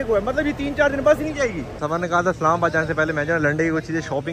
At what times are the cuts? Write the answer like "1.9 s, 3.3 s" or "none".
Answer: 1.7 s